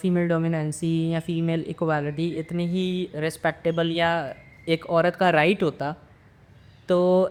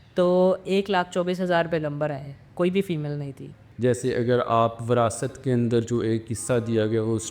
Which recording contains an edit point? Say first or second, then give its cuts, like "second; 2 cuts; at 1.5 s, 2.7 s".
second; 1 cut; at 3.6 s